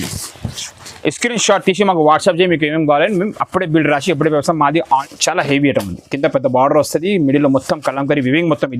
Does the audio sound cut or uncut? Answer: cut